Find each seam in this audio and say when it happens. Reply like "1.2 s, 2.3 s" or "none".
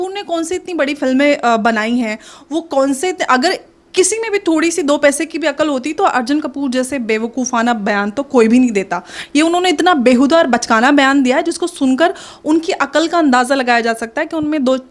none